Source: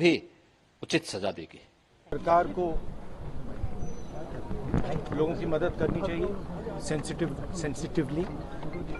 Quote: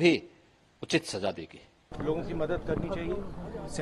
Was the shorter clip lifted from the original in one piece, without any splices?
no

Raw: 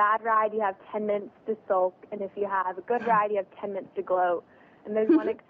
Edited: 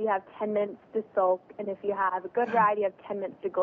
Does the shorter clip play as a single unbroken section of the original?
yes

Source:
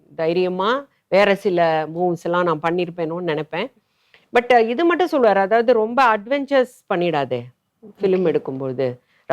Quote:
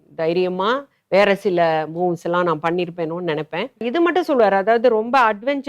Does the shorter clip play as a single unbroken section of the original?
no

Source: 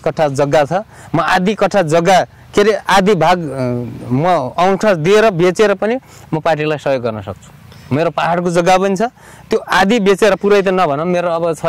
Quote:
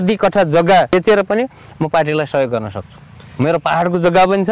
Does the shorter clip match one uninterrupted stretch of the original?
no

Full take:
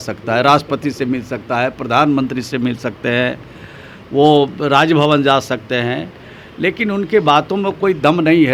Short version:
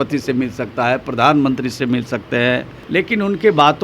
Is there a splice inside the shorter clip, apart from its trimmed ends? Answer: yes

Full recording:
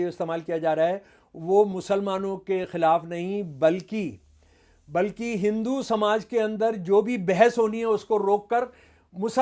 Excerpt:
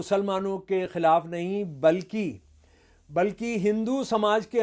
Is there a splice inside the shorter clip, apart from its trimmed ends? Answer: no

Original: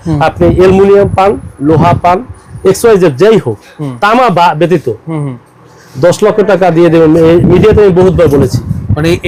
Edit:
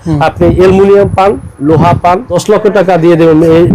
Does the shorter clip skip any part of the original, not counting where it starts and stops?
yes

